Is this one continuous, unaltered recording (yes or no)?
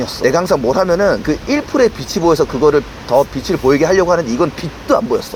yes